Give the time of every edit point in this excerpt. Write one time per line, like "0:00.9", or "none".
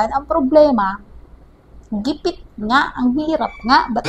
none